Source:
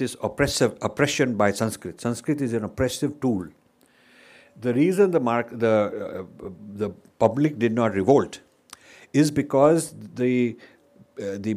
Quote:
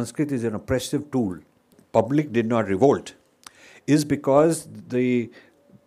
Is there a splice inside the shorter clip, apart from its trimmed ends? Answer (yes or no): yes